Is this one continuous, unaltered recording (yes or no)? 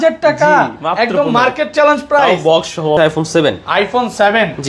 no